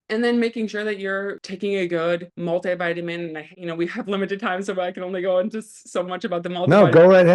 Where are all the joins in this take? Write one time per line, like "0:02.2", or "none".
0:01.4
0:02.3
0:03.5